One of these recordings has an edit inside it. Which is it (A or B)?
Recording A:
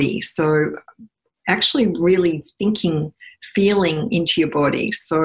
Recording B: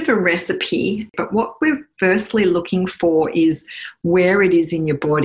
B